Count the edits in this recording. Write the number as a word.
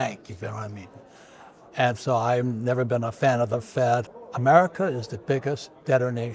one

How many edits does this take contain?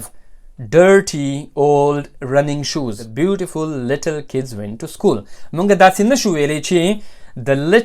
one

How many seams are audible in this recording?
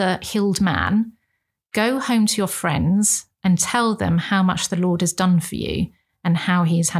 zero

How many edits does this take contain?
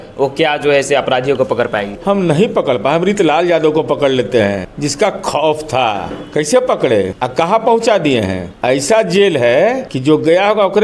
six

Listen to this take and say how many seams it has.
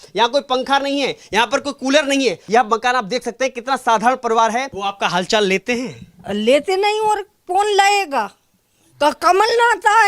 two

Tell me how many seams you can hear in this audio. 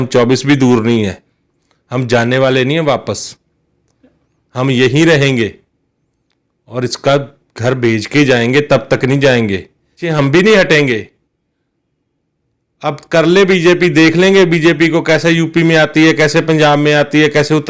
one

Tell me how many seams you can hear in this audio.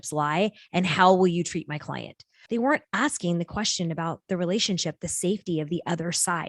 one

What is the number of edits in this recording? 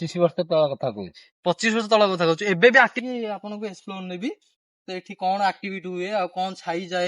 one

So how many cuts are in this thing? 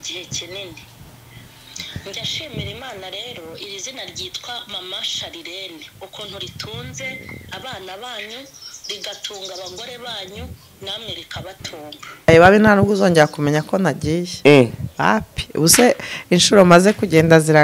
one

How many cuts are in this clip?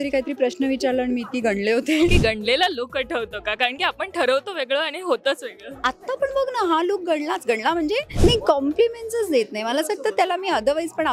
two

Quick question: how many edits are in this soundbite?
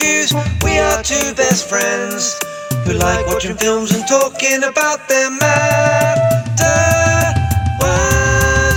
zero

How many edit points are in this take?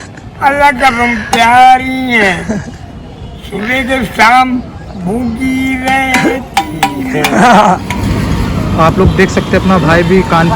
one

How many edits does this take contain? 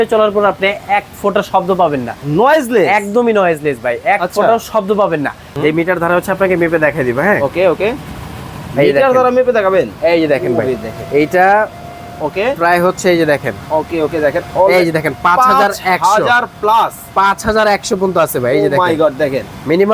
one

